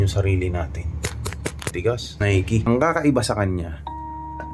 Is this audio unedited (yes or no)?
no